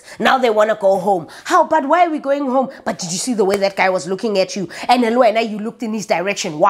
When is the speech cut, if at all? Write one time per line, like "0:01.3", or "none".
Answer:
none